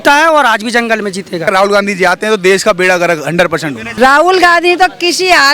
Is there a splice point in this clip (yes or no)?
yes